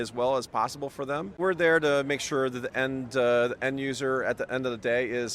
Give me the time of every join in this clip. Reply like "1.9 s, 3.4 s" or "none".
1.4 s